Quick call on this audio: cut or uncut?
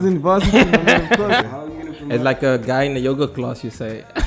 cut